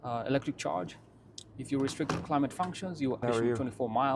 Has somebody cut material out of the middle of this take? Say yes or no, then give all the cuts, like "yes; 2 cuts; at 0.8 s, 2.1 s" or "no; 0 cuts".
yes; 1 cut; at 3.2 s